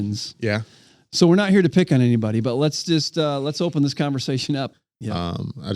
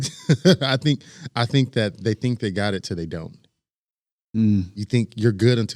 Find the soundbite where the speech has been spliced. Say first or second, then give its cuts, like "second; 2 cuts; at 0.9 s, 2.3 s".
first; 1 cut; at 4.7 s